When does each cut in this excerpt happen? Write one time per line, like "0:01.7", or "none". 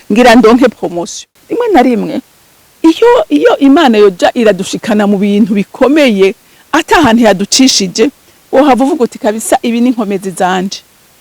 0:01.2